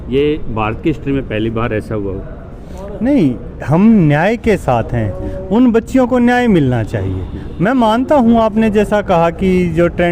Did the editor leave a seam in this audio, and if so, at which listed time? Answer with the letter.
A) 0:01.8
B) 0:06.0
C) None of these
C